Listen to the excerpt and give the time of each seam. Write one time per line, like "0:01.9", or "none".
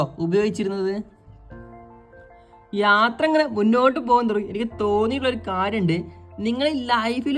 none